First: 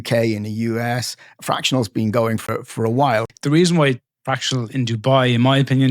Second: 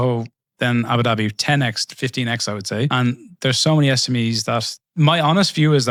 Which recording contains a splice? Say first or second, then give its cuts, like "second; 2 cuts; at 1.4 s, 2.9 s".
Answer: first; 2 cuts; at 2.5 s, 3.3 s